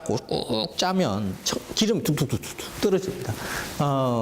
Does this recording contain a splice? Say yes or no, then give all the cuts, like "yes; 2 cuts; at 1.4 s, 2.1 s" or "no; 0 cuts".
yes; 1 cut; at 2.3 s